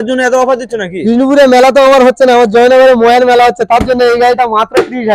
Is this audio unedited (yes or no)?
yes